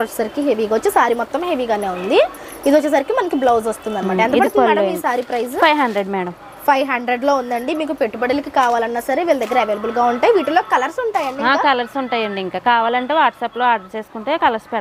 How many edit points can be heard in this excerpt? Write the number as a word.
zero